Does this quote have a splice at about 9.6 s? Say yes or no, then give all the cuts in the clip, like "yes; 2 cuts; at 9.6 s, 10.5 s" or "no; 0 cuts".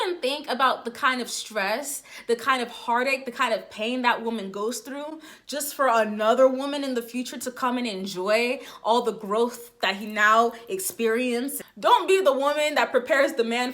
no; 1 cut; at 11.6 s